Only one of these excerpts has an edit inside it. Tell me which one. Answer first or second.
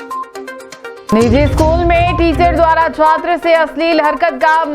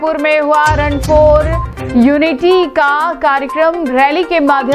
first